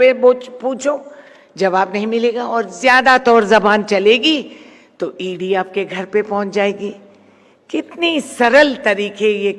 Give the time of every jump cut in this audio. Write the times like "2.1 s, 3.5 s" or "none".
none